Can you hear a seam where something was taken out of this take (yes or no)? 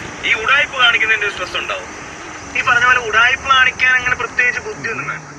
no